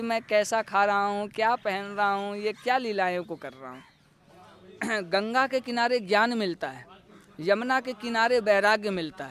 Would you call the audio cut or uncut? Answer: cut